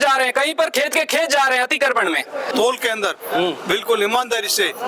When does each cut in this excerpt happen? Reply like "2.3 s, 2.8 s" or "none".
2.5 s